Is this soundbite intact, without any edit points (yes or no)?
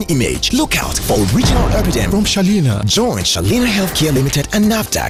yes